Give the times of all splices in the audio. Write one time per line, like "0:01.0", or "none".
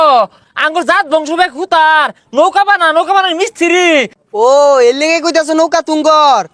0:04.2